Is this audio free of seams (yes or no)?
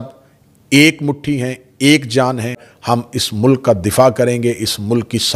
no